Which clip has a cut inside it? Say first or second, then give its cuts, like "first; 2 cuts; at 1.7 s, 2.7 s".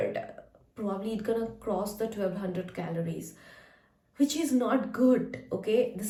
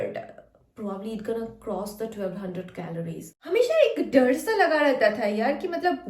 second; 1 cut; at 3.3 s